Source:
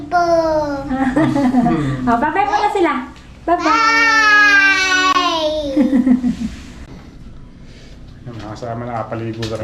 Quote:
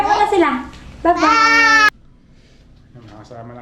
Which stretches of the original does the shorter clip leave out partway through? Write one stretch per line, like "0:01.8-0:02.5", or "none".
0:04.3-0:07.2